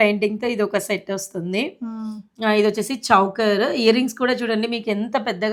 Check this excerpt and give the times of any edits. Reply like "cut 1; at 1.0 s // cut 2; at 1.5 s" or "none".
none